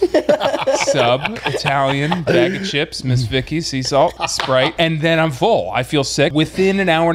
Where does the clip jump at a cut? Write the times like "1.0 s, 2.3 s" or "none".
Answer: 4.5 s, 6.3 s